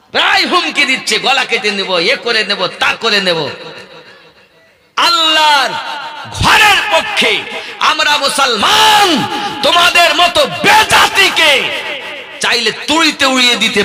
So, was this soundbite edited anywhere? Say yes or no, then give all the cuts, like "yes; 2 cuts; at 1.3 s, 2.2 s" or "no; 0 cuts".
no; 0 cuts